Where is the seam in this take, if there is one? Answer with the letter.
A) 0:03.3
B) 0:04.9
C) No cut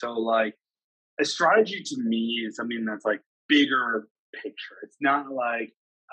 A